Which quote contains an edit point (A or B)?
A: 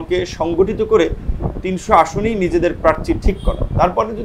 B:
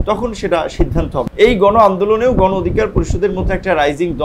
B